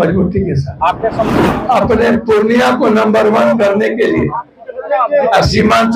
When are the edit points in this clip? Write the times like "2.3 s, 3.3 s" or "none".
1.3 s